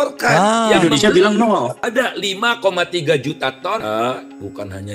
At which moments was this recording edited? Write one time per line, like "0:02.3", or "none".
0:01.8
0:03.8